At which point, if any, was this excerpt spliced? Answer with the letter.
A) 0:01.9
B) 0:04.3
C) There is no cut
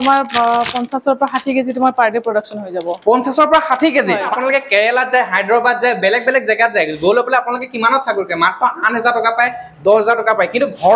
B